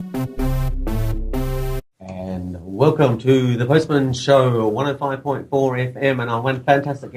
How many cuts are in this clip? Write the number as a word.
one